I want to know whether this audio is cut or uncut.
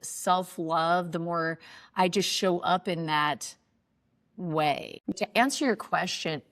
cut